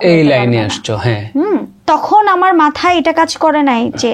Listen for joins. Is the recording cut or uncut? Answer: cut